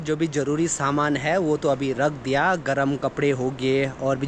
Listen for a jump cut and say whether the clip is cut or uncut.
uncut